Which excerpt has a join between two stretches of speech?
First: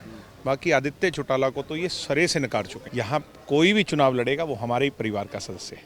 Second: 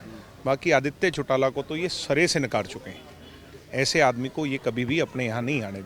first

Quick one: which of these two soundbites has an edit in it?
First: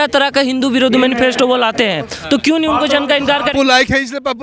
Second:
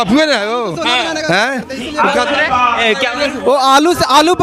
first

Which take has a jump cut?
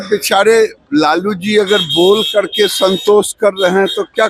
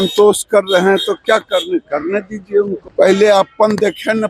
second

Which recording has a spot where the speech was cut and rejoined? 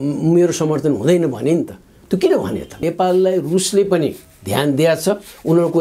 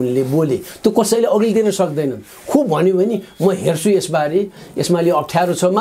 first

